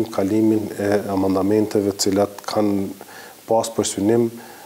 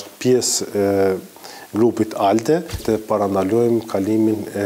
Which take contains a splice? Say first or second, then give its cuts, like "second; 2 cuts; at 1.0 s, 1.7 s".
second; 1 cut; at 2.8 s